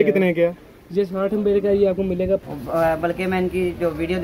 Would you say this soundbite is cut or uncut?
cut